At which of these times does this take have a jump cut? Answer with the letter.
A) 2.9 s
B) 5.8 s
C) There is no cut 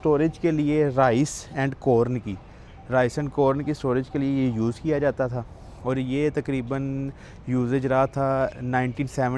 C